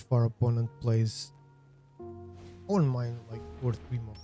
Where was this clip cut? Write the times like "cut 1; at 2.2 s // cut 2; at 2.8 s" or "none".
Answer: cut 1; at 1.2 s // cut 2; at 2.7 s